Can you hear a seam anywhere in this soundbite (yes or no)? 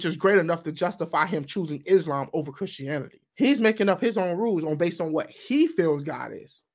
yes